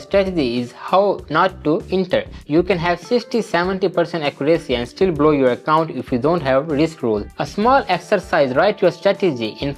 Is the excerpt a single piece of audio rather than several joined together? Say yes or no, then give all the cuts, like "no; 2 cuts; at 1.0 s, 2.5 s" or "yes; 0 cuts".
no; 2 cuts; at 2.4 s, 7.4 s